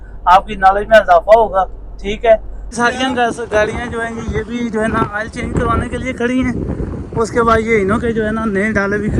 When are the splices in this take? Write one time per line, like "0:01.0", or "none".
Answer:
0:02.6